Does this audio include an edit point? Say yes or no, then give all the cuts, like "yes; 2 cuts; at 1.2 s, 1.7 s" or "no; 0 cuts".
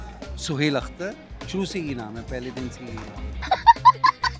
yes; 1 cut; at 3.4 s